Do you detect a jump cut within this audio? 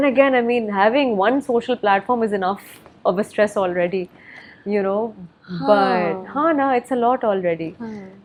no; 0 cuts

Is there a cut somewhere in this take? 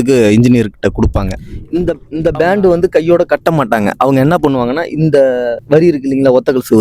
yes; 2 cuts; at 1.6 s, 5.6 s

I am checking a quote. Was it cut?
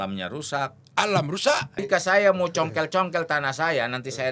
yes; 1 cut; at 1.7 s

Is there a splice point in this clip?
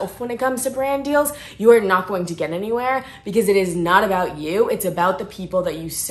no; 0 cuts

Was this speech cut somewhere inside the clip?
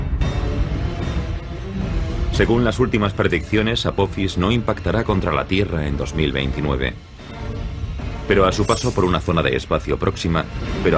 yes; 1 cut; at 4.1 s

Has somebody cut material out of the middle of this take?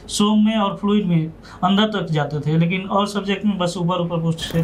no; 0 cuts

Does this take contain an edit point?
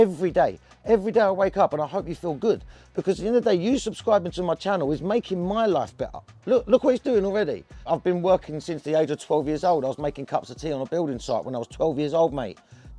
yes; 1 cut; at 7.8 s

